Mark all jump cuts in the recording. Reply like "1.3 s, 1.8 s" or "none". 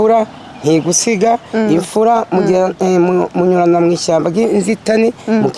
none